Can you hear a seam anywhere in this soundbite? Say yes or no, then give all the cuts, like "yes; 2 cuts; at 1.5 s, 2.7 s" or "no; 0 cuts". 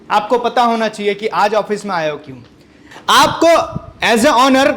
yes; 1 cut; at 2.9 s